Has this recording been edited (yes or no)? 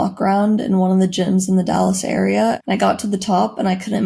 yes